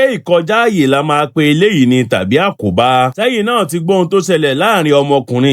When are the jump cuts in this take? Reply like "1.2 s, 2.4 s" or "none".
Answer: none